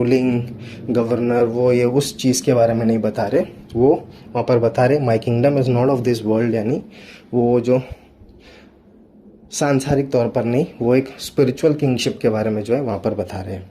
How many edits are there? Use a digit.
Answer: 0